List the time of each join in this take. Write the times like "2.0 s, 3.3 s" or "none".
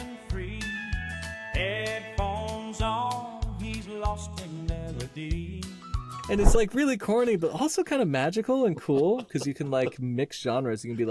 none